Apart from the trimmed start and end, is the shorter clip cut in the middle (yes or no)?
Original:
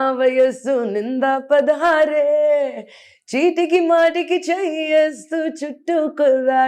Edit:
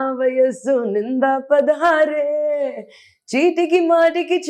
no